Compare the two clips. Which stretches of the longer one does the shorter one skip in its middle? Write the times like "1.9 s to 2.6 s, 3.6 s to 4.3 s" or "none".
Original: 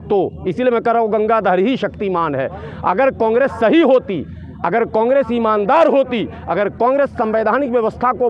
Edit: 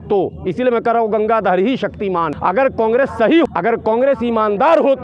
2.3 s to 2.7 s, 3.9 s to 4.5 s

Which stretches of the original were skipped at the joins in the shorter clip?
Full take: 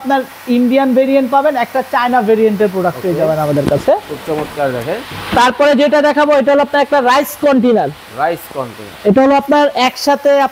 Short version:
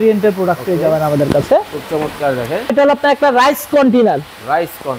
5.1 s to 6.4 s

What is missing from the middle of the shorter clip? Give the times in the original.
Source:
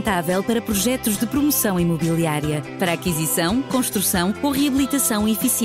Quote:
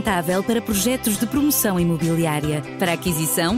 none

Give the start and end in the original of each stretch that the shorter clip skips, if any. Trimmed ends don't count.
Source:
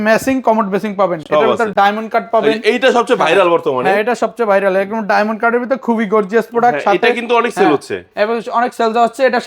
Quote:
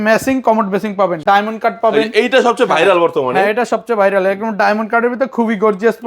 1.2 s to 1.7 s

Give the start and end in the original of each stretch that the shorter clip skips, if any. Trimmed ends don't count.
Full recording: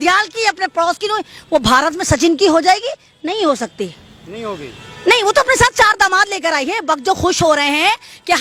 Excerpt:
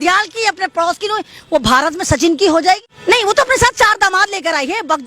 2.9 s to 4.9 s

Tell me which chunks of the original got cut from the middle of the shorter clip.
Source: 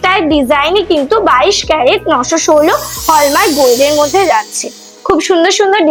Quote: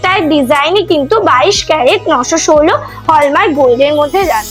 none

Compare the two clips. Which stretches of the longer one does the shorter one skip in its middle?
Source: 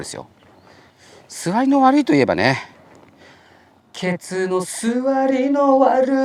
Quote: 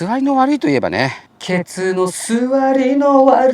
2.7 s to 3.8 s

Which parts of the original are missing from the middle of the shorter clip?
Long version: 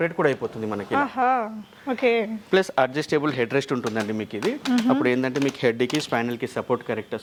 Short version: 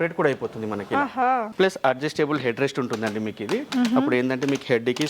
1.5 s to 2.4 s

